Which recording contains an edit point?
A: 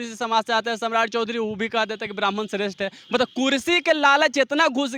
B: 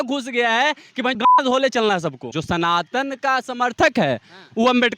B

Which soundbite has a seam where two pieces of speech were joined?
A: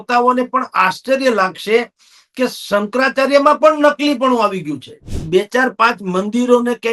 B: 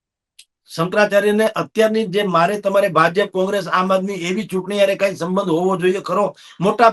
A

